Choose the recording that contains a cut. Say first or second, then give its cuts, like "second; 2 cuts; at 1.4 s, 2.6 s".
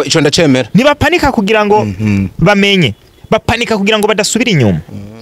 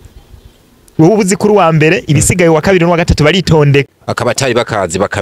second; 1 cut; at 4.0 s